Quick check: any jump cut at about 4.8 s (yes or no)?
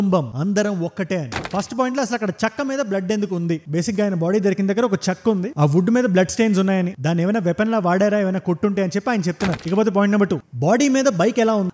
no